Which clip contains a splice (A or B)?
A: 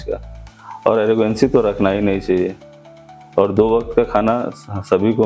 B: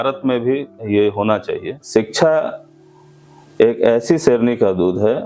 B